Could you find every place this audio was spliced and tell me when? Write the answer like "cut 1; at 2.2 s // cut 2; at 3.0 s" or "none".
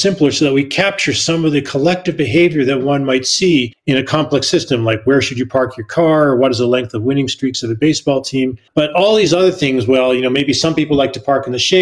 none